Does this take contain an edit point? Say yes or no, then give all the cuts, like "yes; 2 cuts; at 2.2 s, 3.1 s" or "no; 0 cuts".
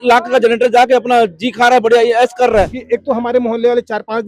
yes; 1 cut; at 2.8 s